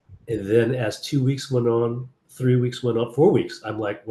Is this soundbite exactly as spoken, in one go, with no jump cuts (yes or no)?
yes